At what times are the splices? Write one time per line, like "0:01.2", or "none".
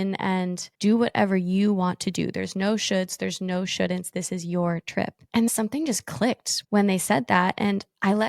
0:06.6